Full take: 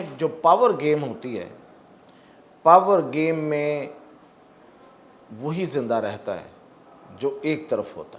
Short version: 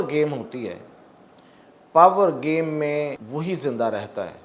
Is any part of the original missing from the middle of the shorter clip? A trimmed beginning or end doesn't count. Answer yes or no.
yes